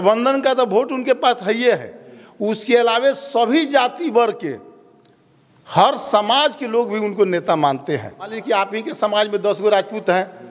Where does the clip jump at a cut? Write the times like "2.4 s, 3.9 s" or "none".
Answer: 8.4 s